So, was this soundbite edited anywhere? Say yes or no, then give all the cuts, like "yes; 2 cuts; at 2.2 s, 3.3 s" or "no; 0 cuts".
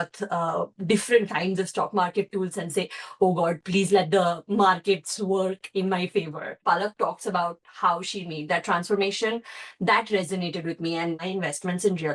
yes; 2 cuts; at 6.6 s, 11.2 s